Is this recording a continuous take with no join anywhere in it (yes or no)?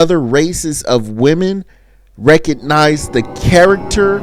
yes